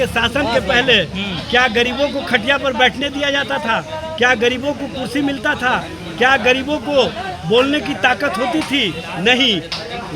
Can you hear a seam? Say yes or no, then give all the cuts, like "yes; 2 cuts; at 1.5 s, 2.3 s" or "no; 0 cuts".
no; 0 cuts